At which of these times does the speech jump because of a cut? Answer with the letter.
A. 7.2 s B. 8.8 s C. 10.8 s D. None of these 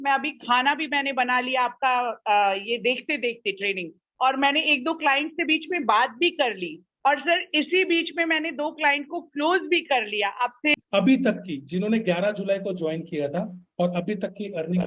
C